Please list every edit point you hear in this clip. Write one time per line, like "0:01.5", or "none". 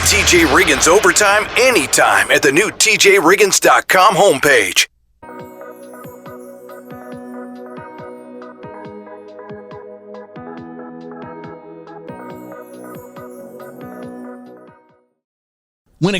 0:05.0